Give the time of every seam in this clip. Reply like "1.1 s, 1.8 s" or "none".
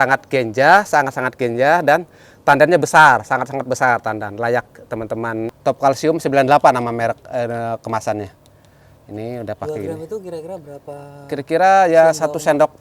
5.5 s